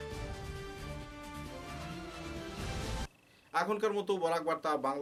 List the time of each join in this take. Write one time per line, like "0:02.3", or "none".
none